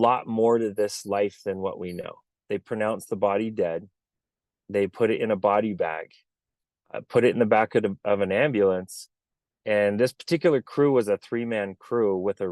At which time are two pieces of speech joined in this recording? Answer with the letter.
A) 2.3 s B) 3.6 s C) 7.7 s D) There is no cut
A